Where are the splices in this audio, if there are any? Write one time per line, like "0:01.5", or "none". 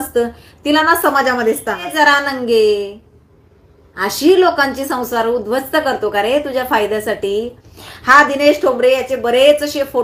0:01.9

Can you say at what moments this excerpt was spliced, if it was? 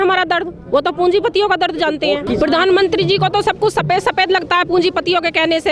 0:02.2

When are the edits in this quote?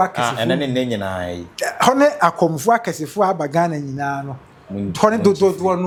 none

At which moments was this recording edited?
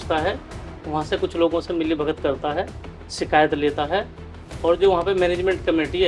none

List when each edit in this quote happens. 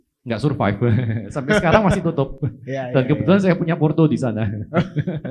none

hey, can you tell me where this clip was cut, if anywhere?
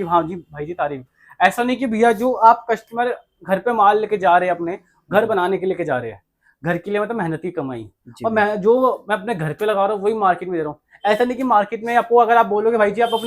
none

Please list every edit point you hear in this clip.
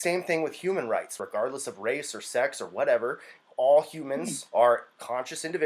0:01.2

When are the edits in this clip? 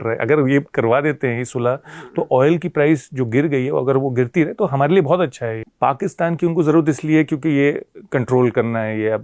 0:05.6

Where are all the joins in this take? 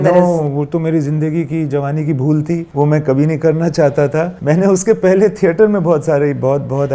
0:02.7
0:04.3

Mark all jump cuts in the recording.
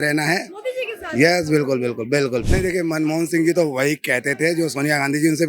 0:02.4

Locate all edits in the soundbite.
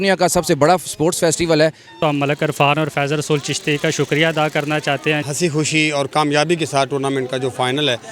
0:01.9
0:05.2

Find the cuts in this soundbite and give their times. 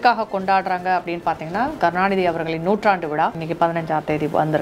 0:01.8
0:03.4

